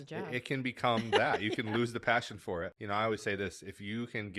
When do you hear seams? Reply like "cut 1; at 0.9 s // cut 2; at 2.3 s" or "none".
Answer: cut 1; at 2.7 s